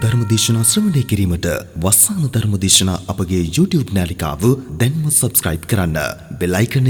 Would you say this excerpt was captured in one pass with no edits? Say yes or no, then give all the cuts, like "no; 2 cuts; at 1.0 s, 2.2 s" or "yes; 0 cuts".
yes; 0 cuts